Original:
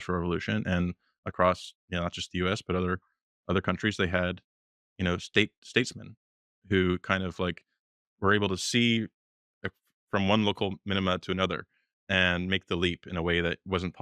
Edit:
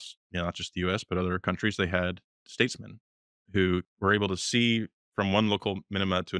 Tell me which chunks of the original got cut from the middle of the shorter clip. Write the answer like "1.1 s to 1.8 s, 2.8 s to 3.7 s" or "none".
3.0 s to 3.6 s, 4.6 s to 5.6 s, 7.0 s to 8.1 s, 9.2 s to 9.9 s

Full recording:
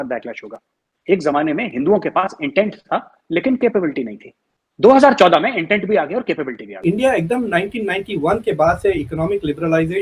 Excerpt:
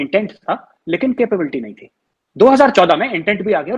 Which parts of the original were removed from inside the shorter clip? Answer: none

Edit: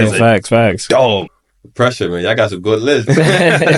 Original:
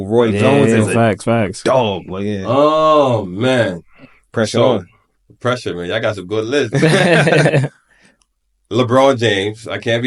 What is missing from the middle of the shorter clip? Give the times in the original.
2.1 s to 5.0 s

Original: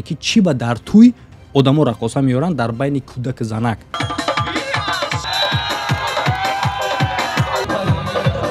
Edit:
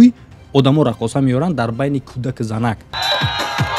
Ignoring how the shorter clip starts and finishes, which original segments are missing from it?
3.9 s to 5.2 s

